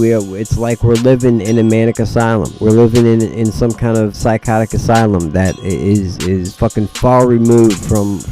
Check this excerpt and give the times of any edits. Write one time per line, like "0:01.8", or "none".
0:02.5
0:04.2
0:05.6
0:06.5